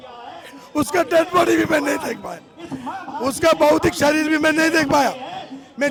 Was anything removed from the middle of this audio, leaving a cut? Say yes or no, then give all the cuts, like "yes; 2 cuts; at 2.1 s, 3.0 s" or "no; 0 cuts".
no; 0 cuts